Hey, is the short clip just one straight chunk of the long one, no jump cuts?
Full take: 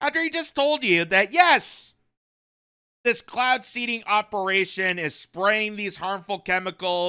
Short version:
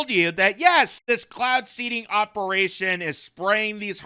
no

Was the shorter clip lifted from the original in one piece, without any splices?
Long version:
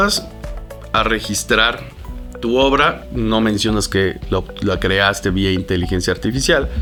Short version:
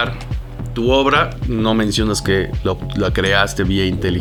yes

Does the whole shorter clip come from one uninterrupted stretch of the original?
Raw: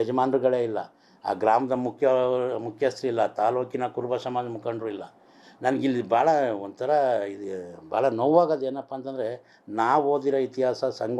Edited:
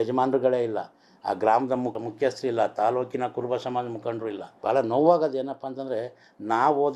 no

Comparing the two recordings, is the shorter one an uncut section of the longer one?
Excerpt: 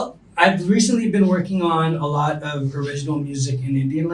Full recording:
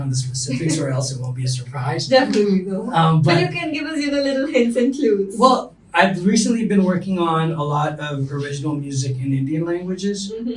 yes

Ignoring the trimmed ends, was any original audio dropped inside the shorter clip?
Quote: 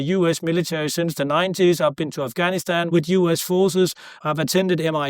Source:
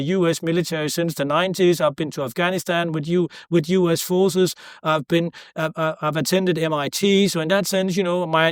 yes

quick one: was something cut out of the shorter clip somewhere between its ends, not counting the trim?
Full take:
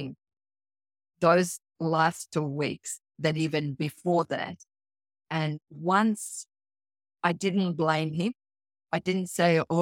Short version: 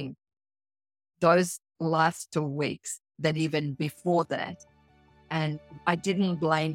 yes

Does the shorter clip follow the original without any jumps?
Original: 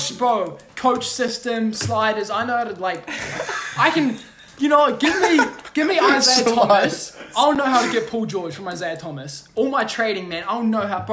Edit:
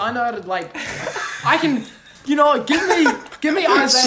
yes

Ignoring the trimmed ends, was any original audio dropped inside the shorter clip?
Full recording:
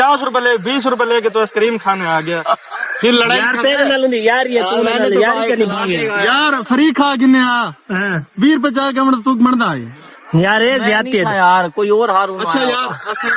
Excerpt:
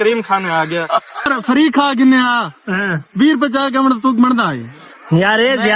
yes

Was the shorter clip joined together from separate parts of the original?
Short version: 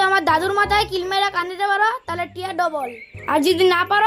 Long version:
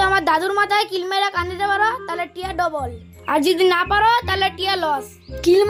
no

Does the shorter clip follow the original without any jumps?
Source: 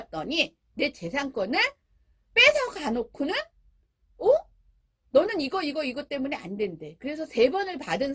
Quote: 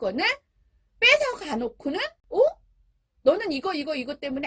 no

